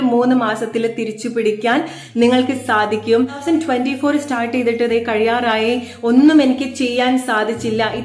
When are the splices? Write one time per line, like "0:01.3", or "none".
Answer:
0:03.4